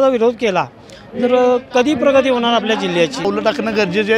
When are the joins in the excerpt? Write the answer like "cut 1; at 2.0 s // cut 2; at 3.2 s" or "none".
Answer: cut 1; at 3.2 s

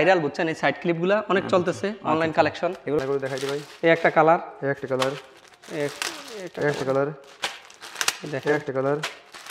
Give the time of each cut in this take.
cut 1; at 3.0 s

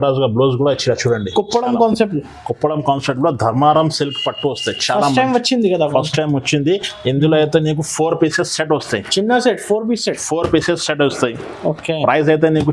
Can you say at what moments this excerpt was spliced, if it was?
none

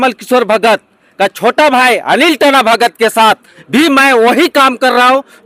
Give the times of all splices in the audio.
none

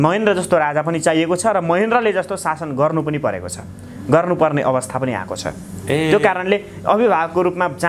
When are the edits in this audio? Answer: none

